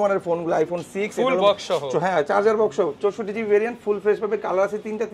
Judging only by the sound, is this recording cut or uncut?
uncut